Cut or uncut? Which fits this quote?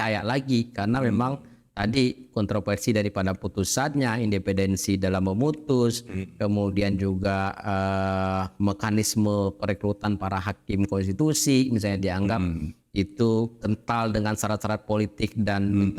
uncut